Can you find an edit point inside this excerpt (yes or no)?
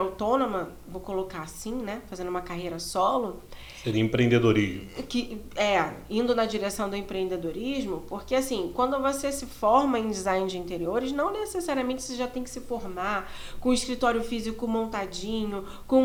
no